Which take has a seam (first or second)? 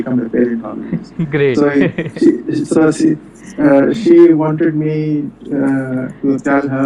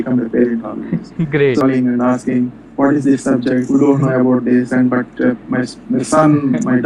second